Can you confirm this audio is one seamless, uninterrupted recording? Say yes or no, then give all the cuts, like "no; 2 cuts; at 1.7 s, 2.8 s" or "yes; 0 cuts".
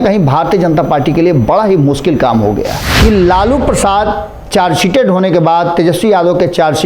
no; 1 cut; at 2.8 s